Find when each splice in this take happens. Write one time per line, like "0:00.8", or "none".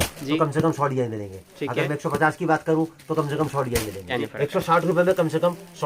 0:04.2